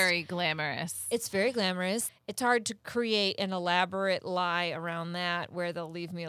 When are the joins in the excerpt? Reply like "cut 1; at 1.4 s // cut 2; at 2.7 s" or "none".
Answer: cut 1; at 2.1 s